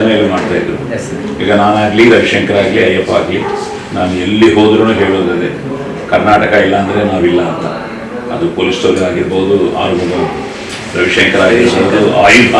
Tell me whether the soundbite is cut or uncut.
cut